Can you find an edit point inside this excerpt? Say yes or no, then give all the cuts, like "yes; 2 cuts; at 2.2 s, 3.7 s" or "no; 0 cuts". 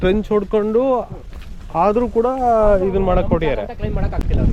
no; 0 cuts